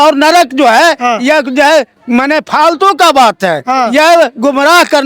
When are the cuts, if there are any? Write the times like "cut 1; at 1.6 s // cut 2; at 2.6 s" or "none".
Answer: none